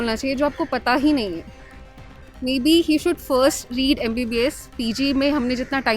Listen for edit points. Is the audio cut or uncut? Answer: uncut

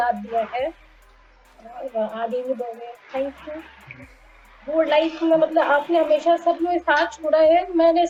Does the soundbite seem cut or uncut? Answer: uncut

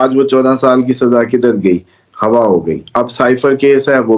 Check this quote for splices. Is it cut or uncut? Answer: uncut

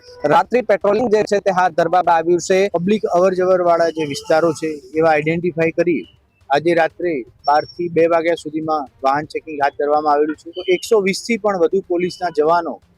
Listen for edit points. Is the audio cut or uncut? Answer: cut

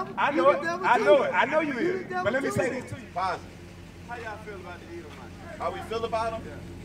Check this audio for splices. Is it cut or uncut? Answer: cut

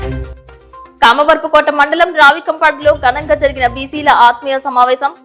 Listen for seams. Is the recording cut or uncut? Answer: uncut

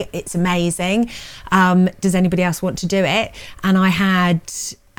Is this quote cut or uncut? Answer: uncut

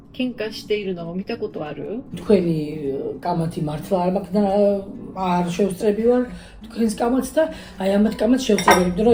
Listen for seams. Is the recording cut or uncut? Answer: uncut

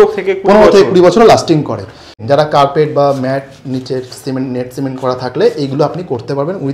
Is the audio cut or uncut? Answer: cut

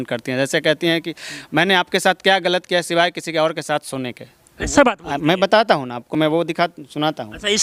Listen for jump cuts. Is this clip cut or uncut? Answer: uncut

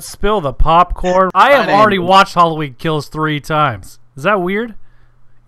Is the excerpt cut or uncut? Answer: cut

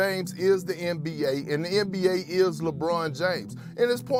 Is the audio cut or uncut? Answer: uncut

